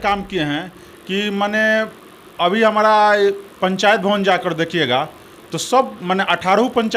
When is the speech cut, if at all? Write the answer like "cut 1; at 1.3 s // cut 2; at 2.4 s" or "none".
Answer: none